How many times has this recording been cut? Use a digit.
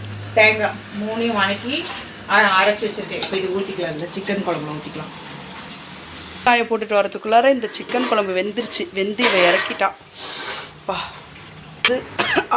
2